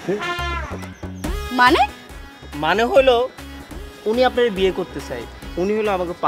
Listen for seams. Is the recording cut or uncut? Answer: uncut